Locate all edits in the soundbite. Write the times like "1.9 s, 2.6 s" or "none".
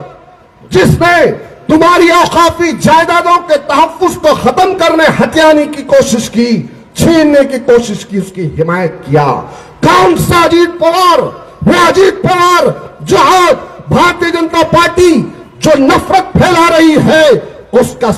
none